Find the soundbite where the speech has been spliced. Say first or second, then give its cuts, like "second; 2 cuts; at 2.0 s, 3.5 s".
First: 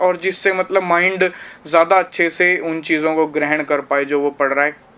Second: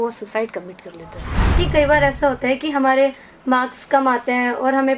second; 1 cut; at 1.6 s